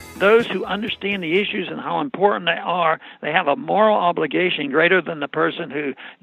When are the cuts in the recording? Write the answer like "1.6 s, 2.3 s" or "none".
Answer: none